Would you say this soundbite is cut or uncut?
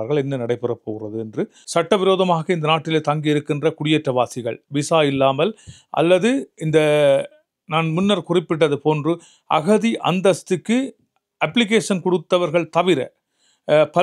cut